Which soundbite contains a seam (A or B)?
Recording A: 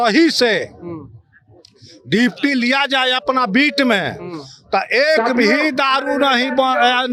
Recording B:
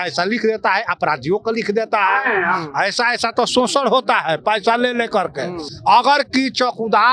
B